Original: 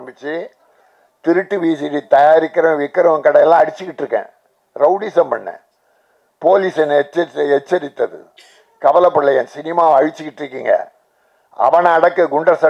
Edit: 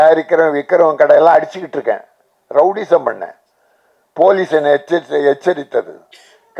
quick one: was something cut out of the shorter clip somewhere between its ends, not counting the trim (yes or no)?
no